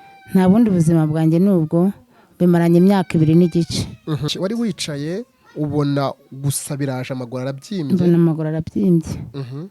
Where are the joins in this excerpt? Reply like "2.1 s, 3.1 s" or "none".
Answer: 4.3 s